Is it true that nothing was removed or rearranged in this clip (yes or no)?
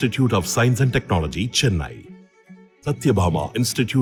yes